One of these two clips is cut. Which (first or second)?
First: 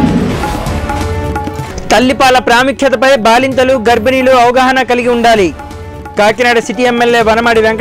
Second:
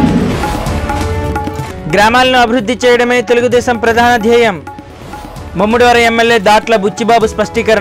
first